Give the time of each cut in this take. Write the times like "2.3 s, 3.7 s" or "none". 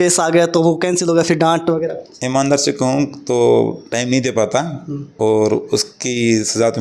none